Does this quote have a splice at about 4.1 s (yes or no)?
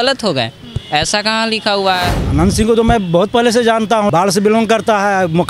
yes